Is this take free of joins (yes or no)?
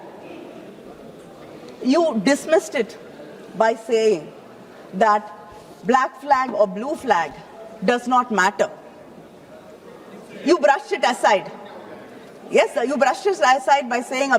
yes